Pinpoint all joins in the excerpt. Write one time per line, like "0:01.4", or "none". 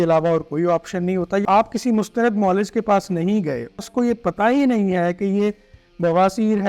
0:01.4
0:03.8